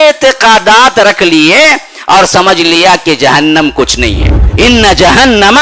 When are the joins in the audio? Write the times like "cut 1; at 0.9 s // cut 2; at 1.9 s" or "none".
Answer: cut 1; at 4.4 s